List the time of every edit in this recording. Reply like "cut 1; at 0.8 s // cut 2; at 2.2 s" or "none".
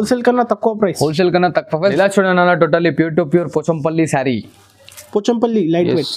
cut 1; at 1.7 s